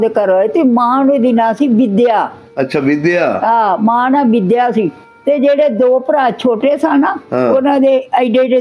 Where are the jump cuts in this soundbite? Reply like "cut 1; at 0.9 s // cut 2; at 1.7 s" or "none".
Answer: none